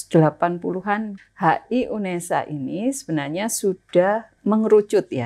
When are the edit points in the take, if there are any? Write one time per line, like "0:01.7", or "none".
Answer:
0:01.2
0:04.3